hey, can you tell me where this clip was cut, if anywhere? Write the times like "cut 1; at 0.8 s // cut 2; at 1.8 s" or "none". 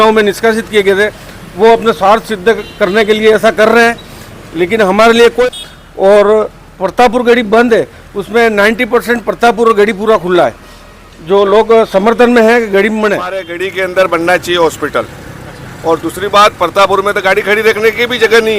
cut 1; at 5.5 s // cut 2; at 13.6 s

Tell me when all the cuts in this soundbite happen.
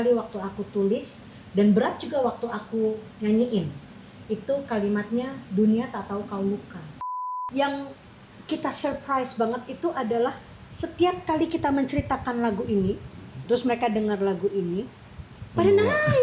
cut 1; at 7.3 s

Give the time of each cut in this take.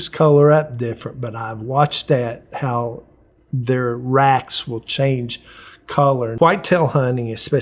cut 1; at 6.3 s

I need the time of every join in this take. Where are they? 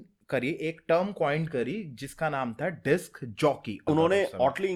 cut 1; at 3.8 s

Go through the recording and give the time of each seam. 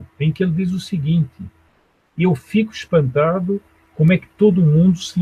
cut 1; at 2.4 s

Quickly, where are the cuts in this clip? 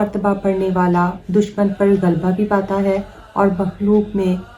none

